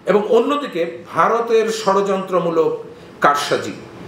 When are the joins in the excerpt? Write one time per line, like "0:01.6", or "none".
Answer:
none